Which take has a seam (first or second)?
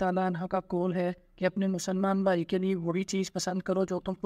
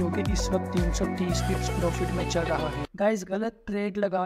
second